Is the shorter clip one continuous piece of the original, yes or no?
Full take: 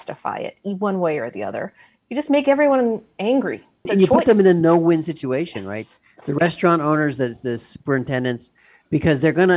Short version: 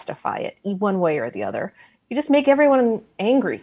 yes